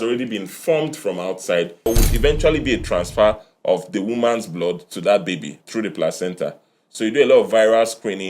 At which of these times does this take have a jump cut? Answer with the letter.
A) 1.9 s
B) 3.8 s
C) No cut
A